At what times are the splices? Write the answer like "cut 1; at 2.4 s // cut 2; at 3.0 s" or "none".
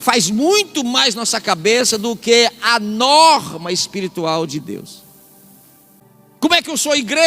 cut 1; at 6.0 s